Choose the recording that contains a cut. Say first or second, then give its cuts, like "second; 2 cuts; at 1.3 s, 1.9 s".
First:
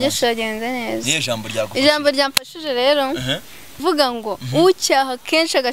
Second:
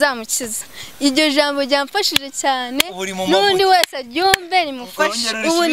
first; 1 cut; at 3.8 s